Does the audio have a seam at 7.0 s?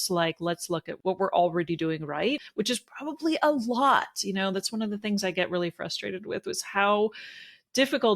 no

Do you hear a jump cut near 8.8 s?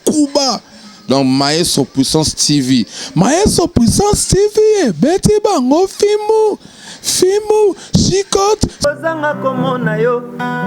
yes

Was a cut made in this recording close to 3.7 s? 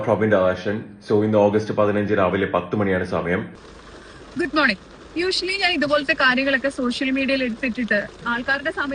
yes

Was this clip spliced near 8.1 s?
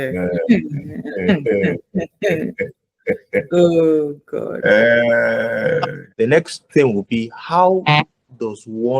no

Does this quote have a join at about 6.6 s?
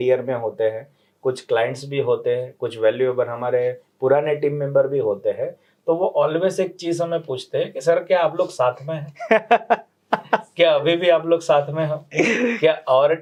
no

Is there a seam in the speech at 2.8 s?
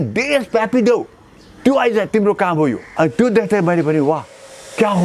yes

